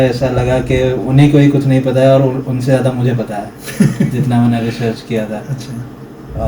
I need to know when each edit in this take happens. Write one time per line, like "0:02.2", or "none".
none